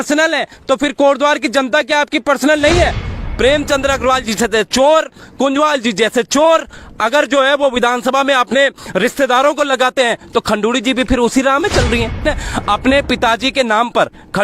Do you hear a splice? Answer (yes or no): yes